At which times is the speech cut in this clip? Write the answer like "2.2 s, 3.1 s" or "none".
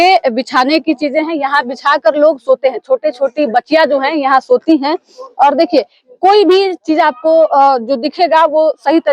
none